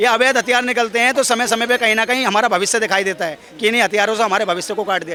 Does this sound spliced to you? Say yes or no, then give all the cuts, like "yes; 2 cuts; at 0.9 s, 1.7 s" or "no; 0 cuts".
no; 0 cuts